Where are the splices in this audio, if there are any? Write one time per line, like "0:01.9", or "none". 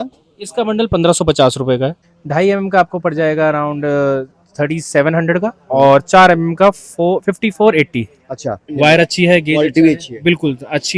0:02.1
0:08.6